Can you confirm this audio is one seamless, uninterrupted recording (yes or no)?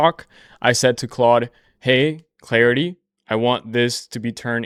yes